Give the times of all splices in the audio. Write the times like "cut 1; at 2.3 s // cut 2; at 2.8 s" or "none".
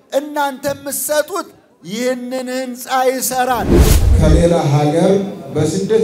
cut 1; at 4.0 s